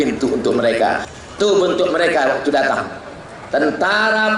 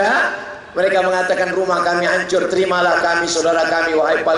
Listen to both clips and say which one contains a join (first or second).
first